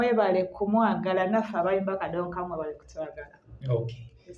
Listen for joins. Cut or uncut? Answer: uncut